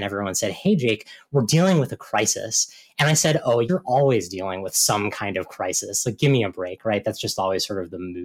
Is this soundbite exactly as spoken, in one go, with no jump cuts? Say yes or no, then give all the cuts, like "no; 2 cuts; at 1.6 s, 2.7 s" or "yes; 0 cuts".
no; 1 cut; at 3.7 s